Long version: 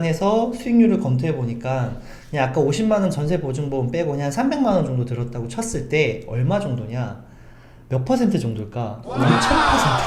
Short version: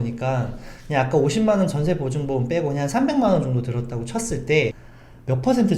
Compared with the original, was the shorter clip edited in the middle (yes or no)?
yes